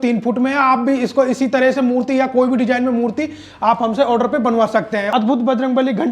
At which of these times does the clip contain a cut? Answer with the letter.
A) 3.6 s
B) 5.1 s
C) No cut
B